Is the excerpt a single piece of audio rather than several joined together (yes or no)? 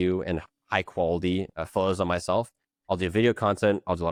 yes